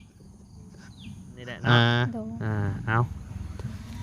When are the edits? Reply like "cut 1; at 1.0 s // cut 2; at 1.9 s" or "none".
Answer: cut 1; at 2.1 s